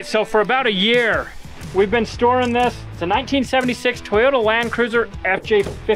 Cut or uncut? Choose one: uncut